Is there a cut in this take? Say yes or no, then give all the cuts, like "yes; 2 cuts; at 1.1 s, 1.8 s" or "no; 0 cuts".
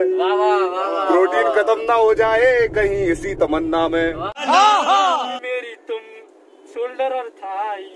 yes; 1 cut; at 5.3 s